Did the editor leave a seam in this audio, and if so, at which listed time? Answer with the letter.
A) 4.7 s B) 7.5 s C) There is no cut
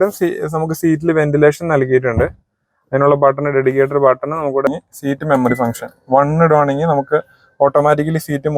A